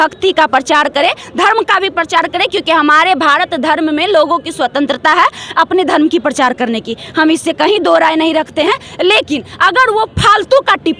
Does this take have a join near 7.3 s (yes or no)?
no